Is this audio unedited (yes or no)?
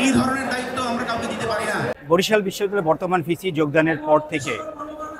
no